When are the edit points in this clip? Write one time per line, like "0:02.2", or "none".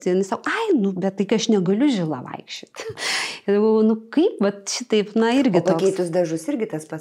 none